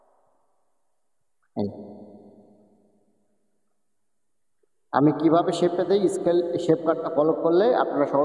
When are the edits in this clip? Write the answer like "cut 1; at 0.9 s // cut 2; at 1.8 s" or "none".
none